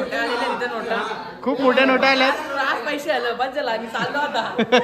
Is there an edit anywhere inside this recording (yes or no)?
no